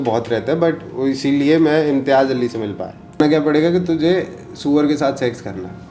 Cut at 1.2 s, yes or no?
no